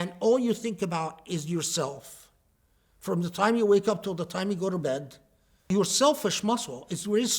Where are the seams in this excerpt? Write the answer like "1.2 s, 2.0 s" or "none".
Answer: 5.6 s